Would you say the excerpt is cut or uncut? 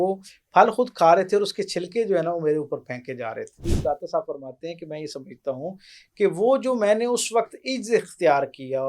cut